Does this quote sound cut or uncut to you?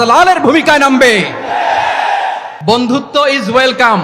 cut